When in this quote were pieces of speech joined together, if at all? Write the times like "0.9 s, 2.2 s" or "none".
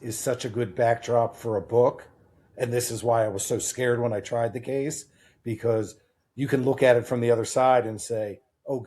2.5 s